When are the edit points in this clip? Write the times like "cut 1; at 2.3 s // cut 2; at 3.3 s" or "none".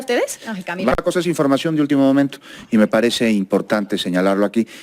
cut 1; at 1.0 s